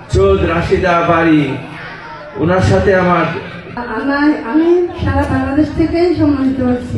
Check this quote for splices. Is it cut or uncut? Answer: cut